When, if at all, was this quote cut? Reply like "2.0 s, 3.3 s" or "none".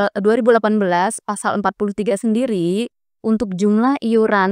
none